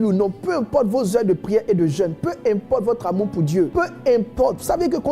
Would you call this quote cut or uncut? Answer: cut